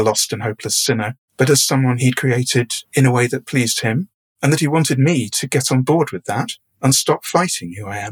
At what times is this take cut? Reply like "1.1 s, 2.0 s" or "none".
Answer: 1.2 s, 2.8 s